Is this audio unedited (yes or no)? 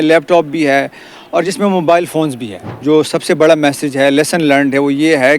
no